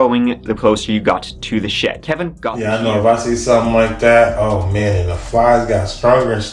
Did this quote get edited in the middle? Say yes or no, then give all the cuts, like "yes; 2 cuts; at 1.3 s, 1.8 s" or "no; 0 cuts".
no; 0 cuts